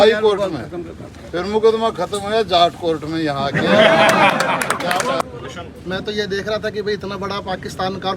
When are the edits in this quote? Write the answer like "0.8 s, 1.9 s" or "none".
5.2 s